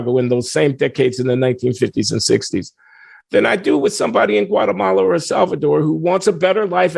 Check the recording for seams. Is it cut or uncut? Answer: uncut